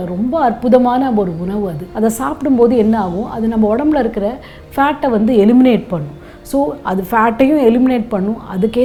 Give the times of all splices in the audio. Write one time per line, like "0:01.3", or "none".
none